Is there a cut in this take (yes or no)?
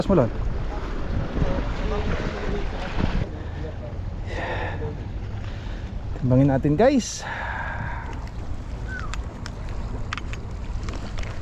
yes